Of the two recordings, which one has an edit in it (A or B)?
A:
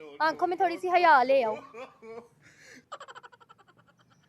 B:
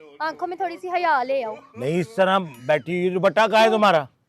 B